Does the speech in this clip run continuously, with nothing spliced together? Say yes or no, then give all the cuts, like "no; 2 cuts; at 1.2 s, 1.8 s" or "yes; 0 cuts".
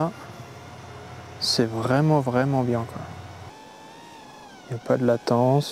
yes; 0 cuts